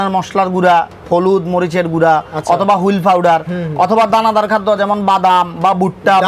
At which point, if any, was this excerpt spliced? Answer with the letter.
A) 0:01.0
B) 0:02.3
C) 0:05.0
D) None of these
D